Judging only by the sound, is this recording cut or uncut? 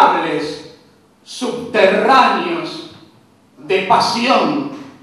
uncut